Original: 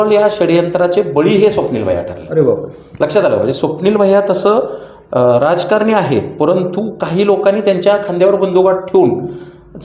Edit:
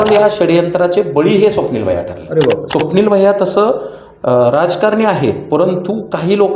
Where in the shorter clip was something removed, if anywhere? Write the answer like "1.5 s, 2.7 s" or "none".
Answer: 2.7 s